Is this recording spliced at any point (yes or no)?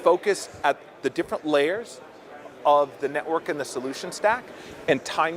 no